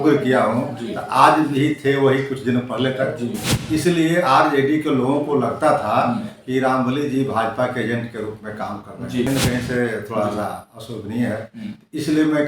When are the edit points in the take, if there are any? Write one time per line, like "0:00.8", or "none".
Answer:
0:09.3